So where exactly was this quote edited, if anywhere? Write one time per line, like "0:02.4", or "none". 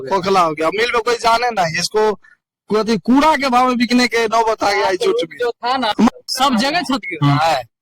0:06.1